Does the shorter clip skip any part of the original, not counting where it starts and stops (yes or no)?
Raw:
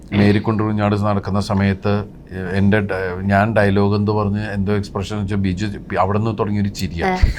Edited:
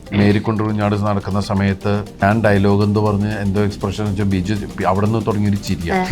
yes